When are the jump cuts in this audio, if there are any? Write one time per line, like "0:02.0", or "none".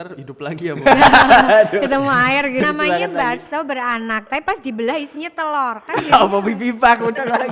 0:02.6

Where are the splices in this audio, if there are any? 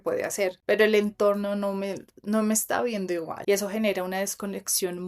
0:03.3

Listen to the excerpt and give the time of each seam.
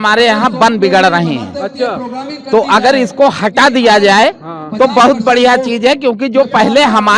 none

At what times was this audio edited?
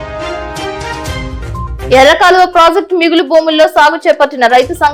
none

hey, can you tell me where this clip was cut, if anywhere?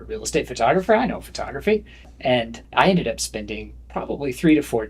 0:02.1

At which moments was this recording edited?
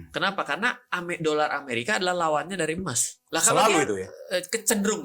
0:03.4

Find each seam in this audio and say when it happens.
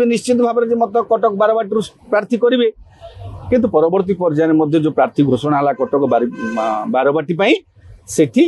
none

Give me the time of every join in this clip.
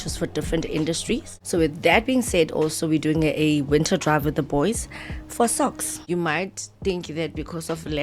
0:01.3
0:05.9

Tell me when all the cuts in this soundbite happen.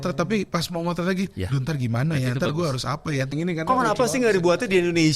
0:03.3

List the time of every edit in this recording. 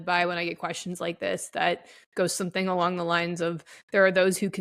none

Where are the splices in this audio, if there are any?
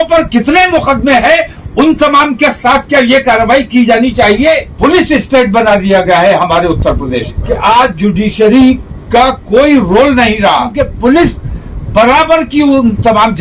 0:04.7
0:07.3
0:10.8

